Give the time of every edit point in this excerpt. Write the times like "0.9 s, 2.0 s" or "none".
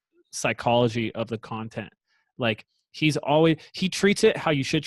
none